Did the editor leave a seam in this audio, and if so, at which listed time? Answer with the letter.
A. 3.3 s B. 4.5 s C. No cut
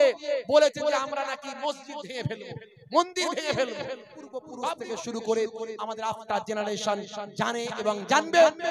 B